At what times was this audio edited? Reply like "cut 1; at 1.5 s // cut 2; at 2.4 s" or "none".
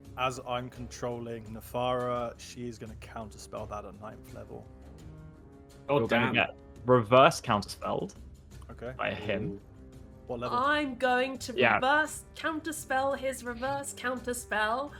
none